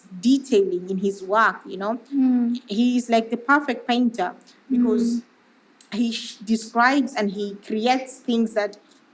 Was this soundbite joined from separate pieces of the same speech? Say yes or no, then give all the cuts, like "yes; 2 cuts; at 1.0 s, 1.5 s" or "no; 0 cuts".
no; 0 cuts